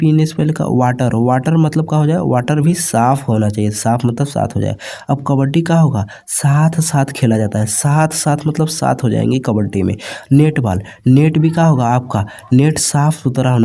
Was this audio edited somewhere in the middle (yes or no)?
no